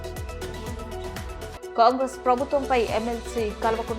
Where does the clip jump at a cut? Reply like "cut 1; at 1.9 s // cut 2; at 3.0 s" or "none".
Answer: cut 1; at 1.5 s